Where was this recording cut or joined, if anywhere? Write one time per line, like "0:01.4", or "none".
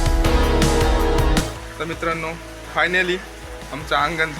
0:01.4